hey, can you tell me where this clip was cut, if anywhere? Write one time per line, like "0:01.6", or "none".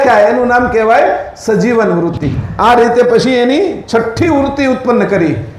0:02.4